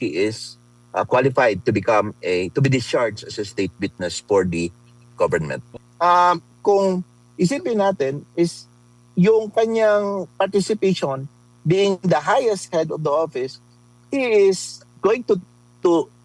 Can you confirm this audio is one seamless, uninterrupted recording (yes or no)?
no